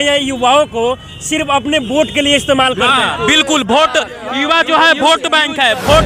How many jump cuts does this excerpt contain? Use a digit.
0